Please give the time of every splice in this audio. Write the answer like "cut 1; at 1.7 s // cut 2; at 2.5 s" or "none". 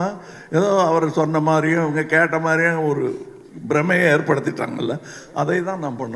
none